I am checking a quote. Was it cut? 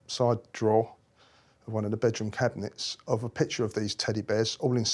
no; 0 cuts

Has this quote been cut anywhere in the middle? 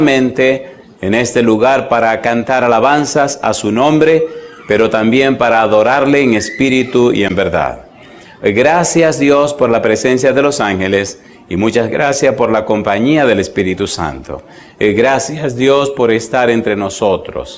no; 0 cuts

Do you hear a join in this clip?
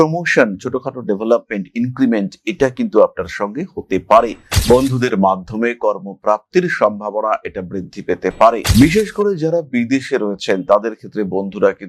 yes; 1 cut; at 4.5 s

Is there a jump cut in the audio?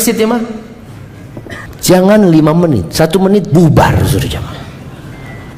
yes; 1 cut; at 1.7 s

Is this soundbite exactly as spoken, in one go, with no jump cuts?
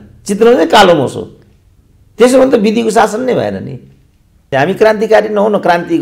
no; 1 cut; at 4.5 s

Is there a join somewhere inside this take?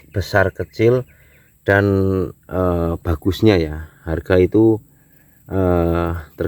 no; 0 cuts

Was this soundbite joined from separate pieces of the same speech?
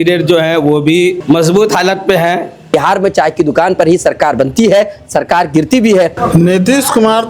yes; 3 cuts; at 1.2 s, 2.7 s, 6.2 s

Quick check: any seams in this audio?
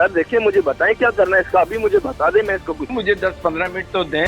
yes; 1 cut; at 2.9 s

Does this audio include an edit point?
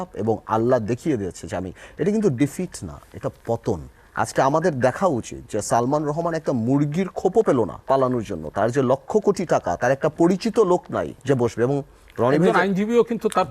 yes; 3 cuts; at 4.0 s, 7.8 s, 11.1 s

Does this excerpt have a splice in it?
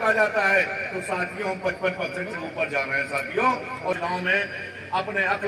yes; 1 cut; at 3.9 s

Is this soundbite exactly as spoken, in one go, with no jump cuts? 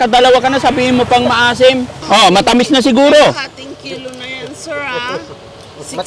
no; 1 cut; at 2.0 s

